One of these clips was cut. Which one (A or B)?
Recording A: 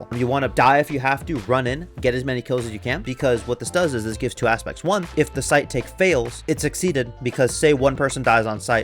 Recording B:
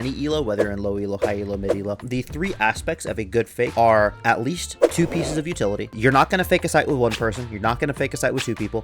B